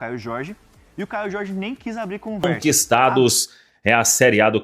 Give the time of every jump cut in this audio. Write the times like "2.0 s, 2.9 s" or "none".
2.5 s